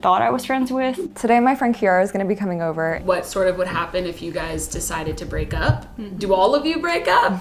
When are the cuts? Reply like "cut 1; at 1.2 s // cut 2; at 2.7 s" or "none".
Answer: cut 1; at 1.1 s // cut 2; at 3.0 s